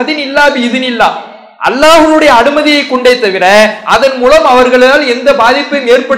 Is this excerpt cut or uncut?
uncut